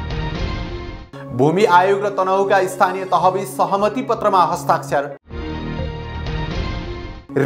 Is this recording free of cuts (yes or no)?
yes